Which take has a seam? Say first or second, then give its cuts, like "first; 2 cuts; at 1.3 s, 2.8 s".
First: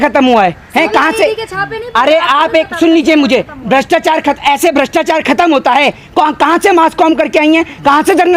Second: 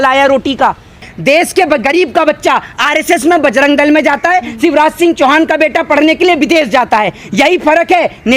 second; 1 cut; at 1.0 s